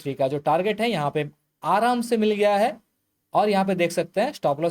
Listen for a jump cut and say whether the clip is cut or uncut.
uncut